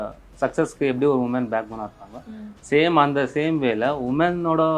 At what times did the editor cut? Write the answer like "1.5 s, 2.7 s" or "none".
none